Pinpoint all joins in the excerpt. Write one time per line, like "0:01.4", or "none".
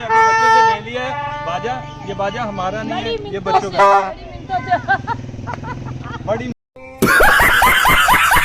none